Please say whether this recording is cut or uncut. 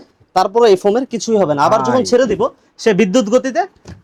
uncut